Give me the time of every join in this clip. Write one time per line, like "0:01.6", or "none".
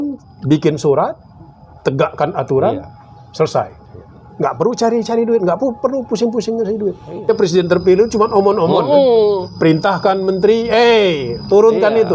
0:07.3